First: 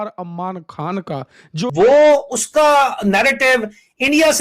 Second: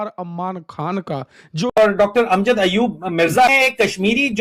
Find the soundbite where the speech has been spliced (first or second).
first